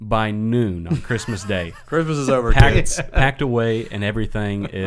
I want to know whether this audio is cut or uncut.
uncut